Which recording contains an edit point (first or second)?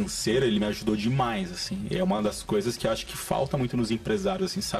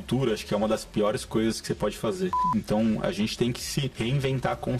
second